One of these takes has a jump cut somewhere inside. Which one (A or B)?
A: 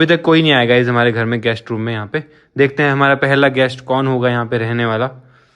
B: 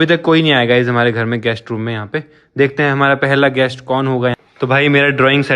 B